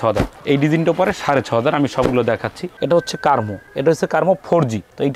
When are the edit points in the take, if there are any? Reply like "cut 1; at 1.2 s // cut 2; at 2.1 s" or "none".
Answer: cut 1; at 2.7 s